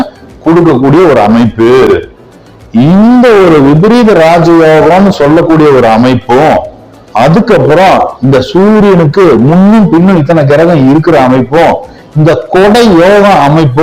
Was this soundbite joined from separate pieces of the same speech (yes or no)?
no